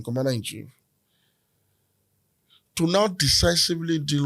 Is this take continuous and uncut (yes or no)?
yes